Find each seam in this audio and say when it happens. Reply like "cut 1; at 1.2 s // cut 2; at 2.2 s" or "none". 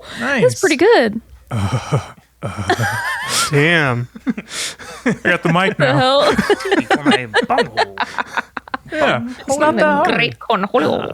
none